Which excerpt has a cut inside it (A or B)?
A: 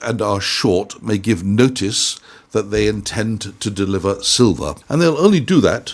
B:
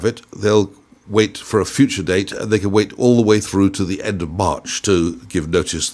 A